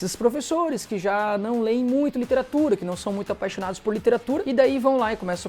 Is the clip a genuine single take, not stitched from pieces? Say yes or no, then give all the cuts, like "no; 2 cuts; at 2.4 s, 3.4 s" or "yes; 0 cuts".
no; 1 cut; at 4.4 s